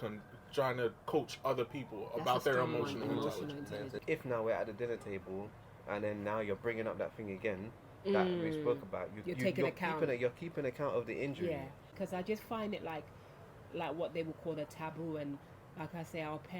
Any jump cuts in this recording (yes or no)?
yes